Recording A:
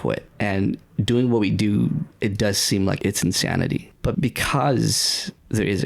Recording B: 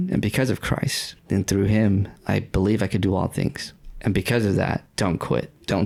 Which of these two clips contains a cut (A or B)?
A